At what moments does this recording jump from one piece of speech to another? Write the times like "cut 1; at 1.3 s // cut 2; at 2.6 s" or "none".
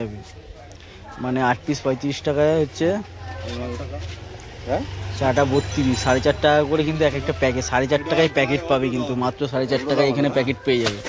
none